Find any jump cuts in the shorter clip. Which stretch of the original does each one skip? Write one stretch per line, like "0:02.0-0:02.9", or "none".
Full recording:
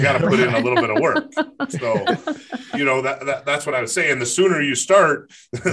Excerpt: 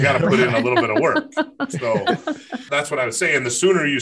0:02.7-0:03.4